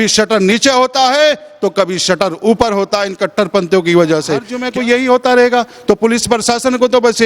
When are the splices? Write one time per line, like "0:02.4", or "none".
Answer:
0:04.6